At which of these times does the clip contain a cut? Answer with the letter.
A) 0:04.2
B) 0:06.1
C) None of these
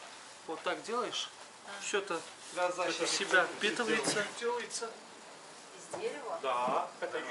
A